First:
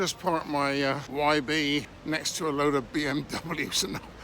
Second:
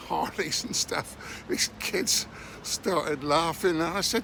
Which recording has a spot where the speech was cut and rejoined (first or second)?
first